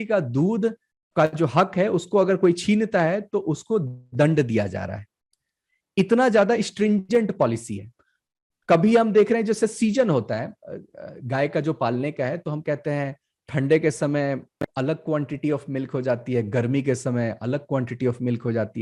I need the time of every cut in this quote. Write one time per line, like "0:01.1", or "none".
none